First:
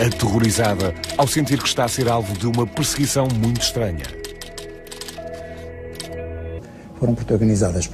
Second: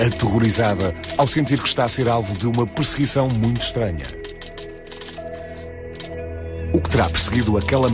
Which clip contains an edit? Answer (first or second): second